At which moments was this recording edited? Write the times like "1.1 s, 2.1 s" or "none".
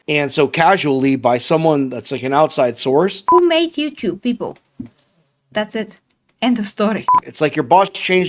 3.2 s, 7.2 s

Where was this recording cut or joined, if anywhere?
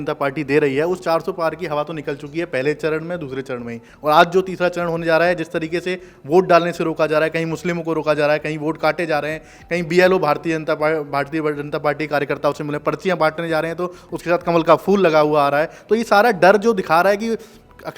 none

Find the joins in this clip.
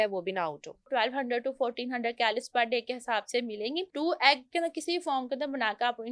0.9 s, 3.9 s

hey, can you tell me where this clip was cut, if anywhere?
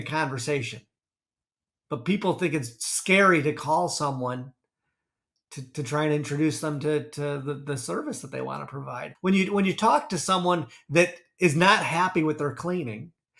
9.1 s

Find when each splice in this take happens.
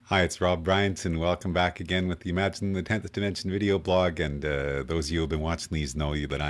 2.6 s

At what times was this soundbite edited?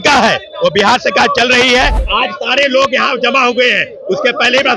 2.0 s

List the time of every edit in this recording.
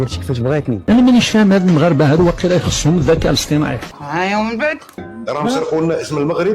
0.8 s, 3.9 s, 5.1 s

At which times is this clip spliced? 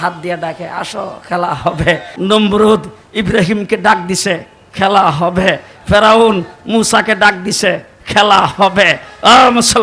2.1 s

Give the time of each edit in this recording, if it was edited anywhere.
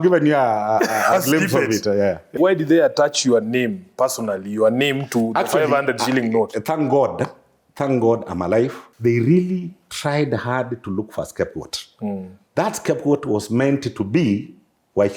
2.3 s, 8.8 s

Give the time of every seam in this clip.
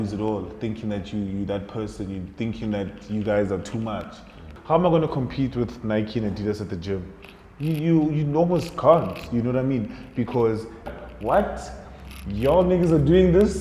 4.5 s, 10.9 s

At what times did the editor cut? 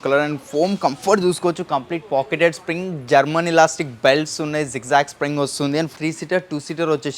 5.9 s

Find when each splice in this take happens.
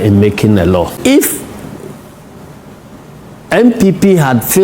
1.0 s

